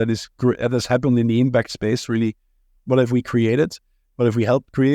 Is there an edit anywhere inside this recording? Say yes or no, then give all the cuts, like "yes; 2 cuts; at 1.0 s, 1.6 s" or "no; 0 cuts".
no; 0 cuts